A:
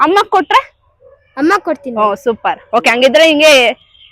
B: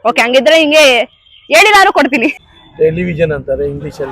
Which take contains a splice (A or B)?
B